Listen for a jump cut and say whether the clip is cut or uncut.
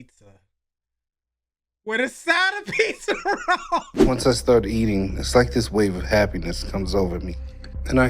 cut